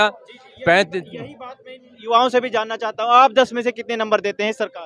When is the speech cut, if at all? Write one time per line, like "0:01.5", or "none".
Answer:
none